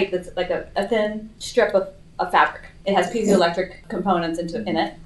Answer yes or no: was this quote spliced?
yes